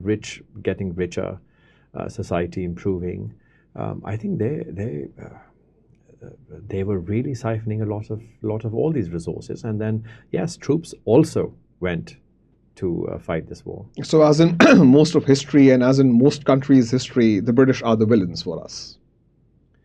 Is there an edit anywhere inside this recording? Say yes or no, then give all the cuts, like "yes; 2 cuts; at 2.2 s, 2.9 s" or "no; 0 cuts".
no; 0 cuts